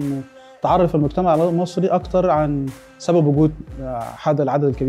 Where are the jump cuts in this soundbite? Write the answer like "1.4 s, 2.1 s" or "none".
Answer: none